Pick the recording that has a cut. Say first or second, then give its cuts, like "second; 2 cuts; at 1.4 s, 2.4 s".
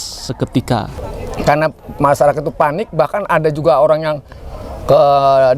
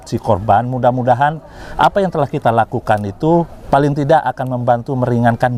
first; 1 cut; at 1.0 s